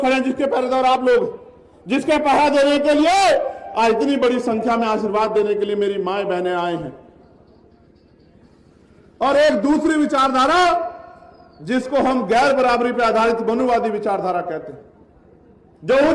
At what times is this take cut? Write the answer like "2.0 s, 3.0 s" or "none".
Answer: 7.7 s

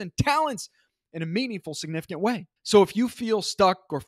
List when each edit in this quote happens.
2.5 s

